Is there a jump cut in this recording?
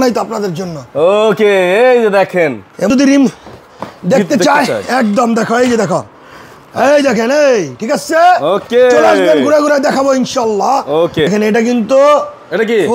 yes; 2 cuts; at 2.9 s, 11.3 s

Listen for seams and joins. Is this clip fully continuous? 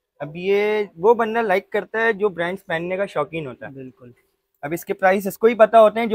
yes; 0 cuts

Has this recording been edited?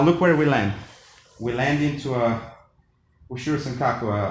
no; 0 cuts

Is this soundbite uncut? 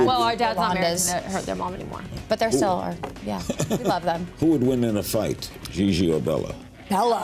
yes; 0 cuts

